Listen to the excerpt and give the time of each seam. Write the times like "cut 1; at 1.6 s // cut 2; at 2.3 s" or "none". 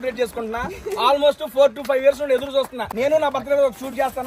cut 1; at 2.8 s